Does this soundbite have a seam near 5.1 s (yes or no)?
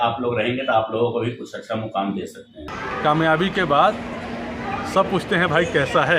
no